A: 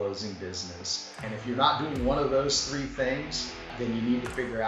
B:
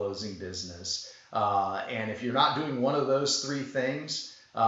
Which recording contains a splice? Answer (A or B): A